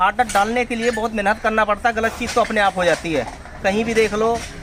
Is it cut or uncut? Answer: uncut